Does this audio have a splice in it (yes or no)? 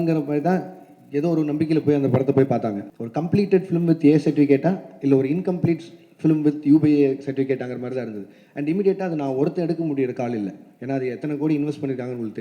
yes